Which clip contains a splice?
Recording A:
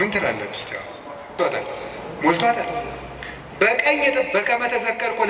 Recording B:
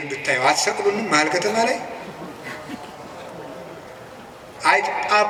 A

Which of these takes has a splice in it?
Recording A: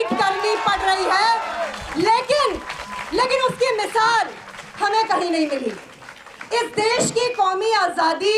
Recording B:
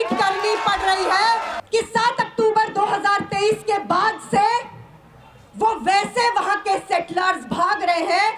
B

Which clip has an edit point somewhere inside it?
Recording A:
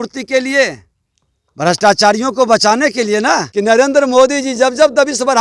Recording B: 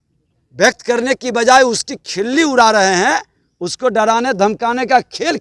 A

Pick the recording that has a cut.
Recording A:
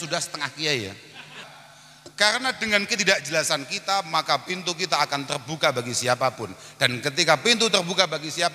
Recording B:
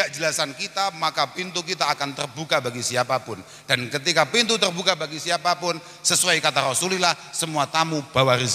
A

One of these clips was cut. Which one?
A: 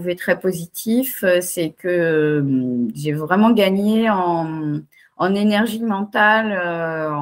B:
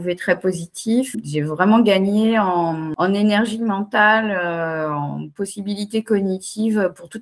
B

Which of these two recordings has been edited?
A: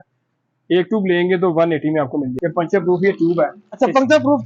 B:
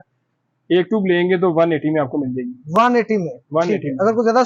A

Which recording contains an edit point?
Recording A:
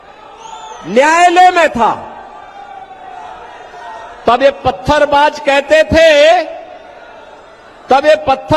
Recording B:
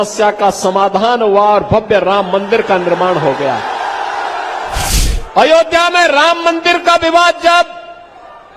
B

